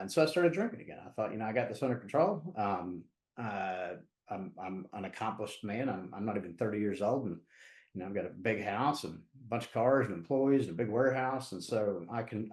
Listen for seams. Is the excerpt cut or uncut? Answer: uncut